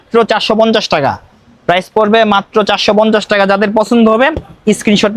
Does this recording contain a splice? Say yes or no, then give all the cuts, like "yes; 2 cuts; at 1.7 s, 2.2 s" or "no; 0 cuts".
no; 0 cuts